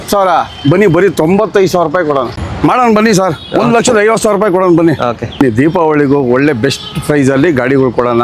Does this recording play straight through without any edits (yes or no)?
no